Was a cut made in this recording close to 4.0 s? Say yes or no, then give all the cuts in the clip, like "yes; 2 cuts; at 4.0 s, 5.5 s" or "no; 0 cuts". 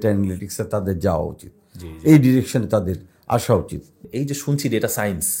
yes; 1 cut; at 4.0 s